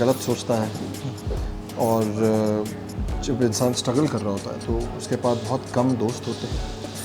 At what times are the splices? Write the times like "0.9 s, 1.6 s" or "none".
none